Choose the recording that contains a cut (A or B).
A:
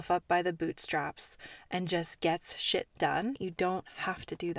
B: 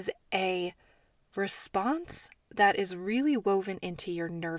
A